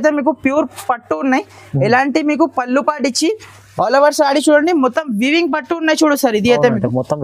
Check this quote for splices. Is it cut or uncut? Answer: uncut